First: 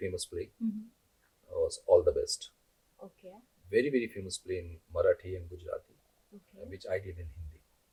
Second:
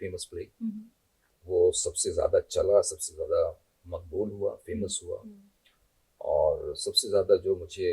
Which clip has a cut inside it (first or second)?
second